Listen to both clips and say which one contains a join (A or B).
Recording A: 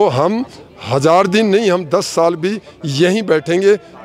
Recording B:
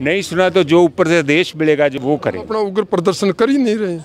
B